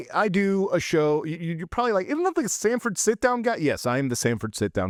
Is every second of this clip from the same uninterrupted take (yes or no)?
yes